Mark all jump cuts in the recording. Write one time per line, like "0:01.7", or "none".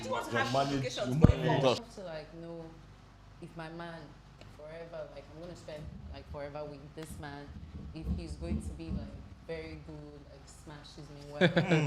0:01.9